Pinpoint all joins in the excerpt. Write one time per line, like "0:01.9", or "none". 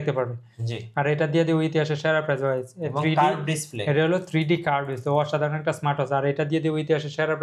none